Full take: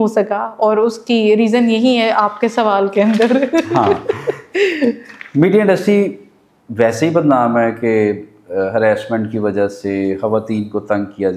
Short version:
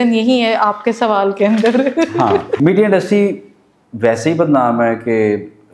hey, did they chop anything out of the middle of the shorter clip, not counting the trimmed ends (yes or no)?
yes